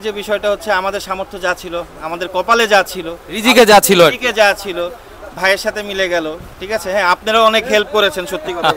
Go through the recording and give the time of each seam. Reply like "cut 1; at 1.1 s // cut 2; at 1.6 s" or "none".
none